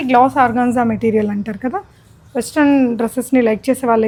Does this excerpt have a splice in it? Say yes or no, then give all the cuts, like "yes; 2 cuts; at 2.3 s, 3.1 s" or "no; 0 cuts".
no; 0 cuts